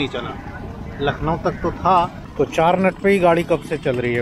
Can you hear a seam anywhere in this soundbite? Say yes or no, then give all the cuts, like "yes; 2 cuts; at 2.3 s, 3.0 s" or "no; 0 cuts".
yes; 1 cut; at 2.2 s